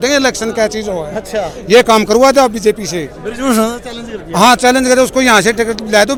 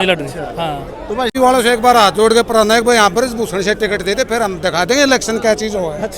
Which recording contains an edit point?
second; 1 cut; at 1.3 s

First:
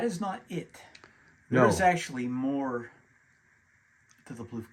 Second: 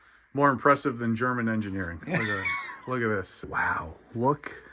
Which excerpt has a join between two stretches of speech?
second; 1 cut; at 3.5 s

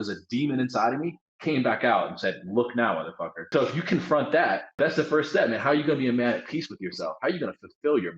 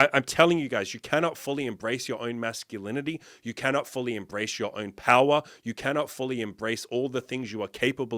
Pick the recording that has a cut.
first; 2 cuts; at 3.5 s, 4.8 s

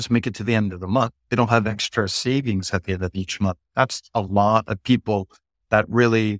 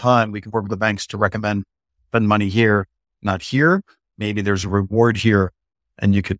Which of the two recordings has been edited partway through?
first; 1 cut; at 1.3 s

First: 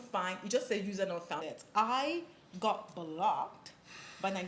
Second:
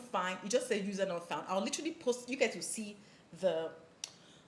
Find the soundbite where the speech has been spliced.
first; 1 cut; at 1.4 s

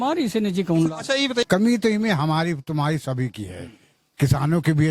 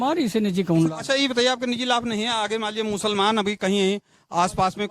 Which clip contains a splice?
first; 1 cut; at 1.4 s

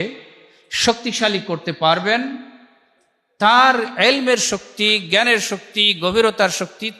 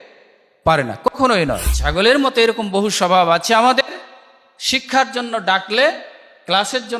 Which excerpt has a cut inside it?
second; 1 cut; at 1.7 s

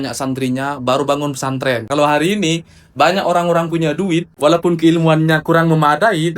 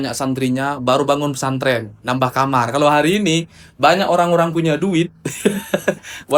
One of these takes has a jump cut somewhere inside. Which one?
first; 2 cuts; at 1.9 s, 4.3 s

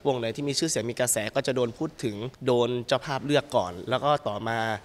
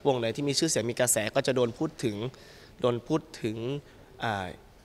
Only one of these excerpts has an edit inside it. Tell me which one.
first; 1 cut; at 2.3 s

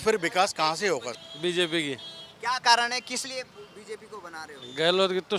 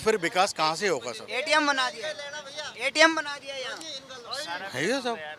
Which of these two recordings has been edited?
first; 1 cut; at 1.2 s

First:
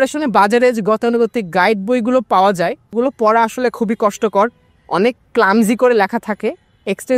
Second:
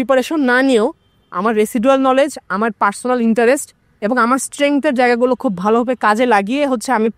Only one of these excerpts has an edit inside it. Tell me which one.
first; 1 cut; at 2.9 s

